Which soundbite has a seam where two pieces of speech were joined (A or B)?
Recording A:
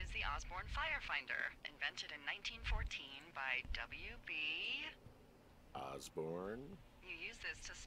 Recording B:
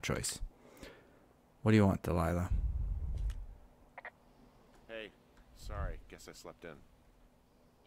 B